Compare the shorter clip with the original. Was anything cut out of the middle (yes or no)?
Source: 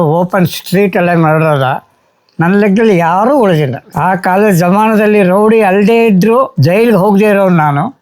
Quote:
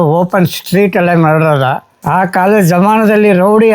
yes